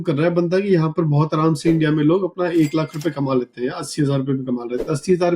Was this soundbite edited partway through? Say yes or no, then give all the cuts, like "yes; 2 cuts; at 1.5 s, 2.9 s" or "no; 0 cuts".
no; 0 cuts